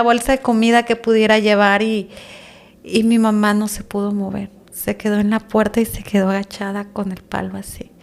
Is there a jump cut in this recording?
no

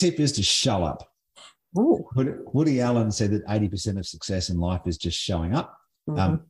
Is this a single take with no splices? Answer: yes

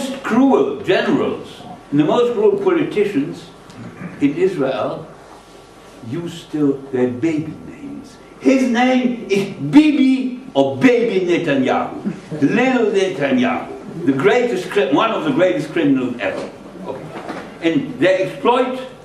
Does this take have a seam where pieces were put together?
yes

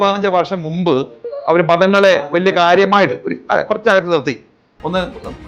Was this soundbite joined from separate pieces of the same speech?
yes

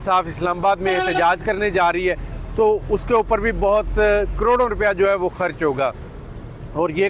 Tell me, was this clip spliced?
no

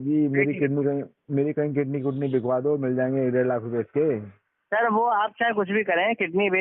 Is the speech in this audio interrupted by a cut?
no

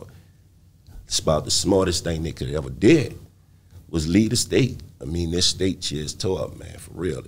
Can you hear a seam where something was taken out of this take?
no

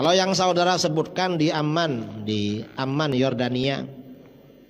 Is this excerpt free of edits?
yes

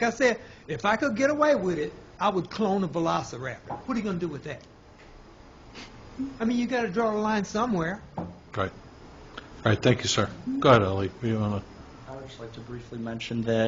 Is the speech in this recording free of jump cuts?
yes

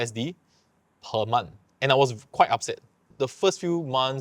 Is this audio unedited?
no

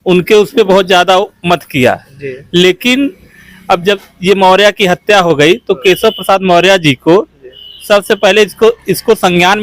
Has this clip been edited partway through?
no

